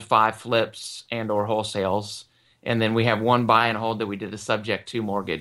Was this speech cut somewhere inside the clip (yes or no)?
no